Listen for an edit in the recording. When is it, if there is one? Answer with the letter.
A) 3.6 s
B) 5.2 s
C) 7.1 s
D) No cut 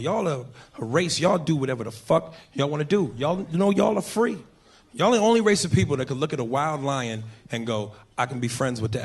A